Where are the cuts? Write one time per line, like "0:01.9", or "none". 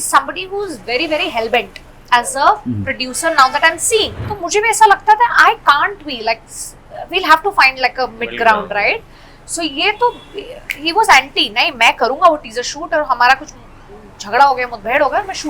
0:04.2